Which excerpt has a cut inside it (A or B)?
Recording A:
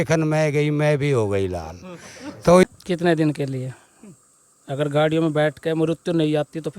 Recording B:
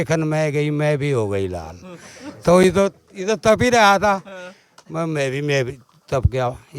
A